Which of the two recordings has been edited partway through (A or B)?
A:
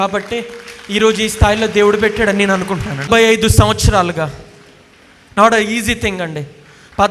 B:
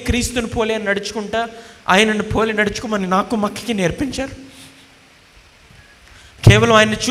A